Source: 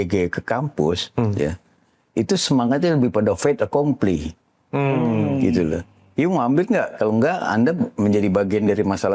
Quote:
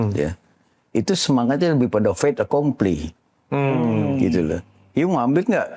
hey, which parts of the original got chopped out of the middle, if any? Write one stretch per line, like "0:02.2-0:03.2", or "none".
none